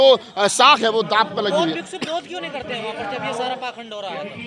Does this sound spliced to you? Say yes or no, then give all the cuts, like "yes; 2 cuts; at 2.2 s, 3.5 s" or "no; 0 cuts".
no; 0 cuts